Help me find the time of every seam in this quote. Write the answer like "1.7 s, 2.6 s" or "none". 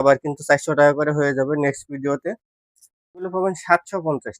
3.3 s